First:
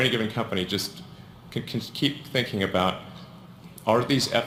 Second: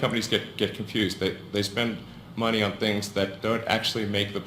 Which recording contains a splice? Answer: second; 1 cut; at 3.3 s

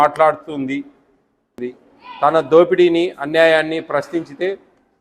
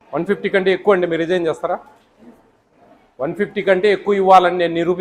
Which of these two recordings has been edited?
first; 1 cut; at 1.6 s

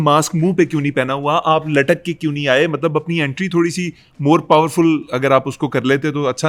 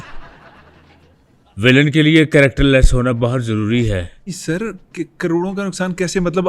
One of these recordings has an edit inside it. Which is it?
second; 1 cut; at 4.3 s

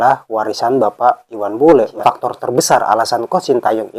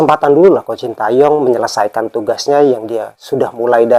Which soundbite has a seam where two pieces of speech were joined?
first; 1 cut; at 2.0 s

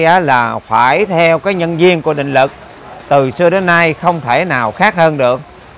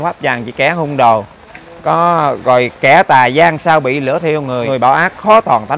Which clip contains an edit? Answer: second; 1 cut; at 4.6 s

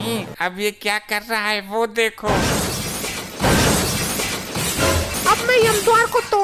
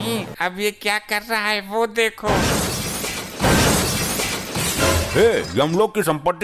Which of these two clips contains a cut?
first; 1 cut; at 5.1 s

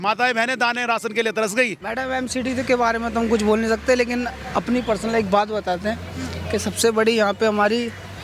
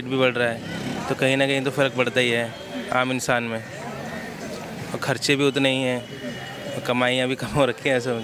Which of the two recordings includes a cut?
first; 1 cut; at 1.8 s

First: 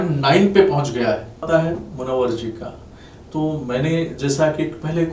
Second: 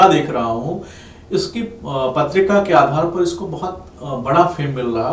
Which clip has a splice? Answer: first; 1 cut; at 1.5 s

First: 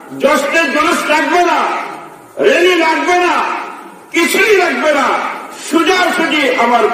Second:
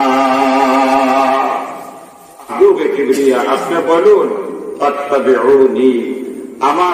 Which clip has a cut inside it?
second; 1 cut; at 2.5 s

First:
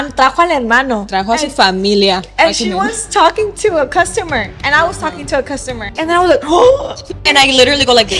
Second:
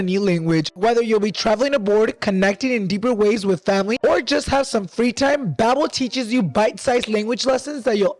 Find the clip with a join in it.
first; 2 cuts; at 5.9 s, 7.3 s

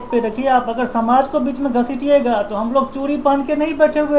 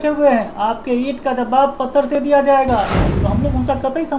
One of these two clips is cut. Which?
second; 1 cut; at 3.1 s

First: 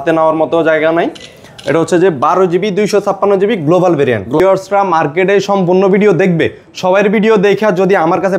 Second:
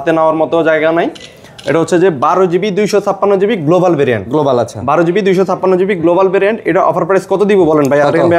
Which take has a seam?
first; 1 cut; at 4.4 s

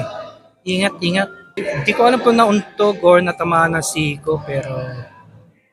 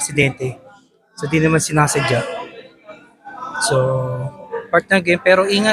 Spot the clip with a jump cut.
first; 1 cut; at 1.4 s

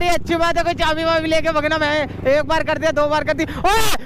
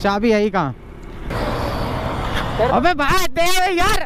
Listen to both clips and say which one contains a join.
second; 1 cut; at 1.3 s

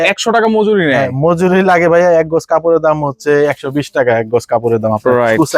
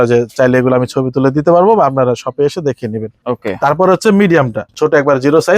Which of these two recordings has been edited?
second; 2 cuts; at 3.2 s, 4.7 s

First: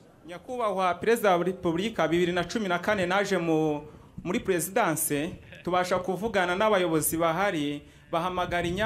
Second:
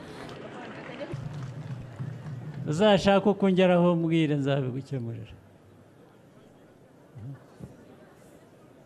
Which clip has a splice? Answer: second; 1 cut; at 1.1 s

